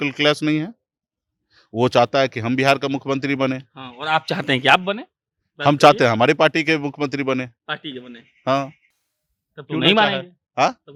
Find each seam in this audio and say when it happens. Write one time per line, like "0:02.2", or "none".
none